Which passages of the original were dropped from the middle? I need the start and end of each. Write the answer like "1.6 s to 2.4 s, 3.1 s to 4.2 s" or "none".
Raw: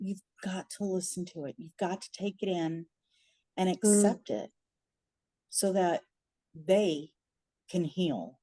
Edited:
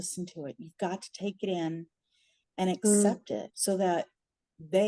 4.5 s to 5.5 s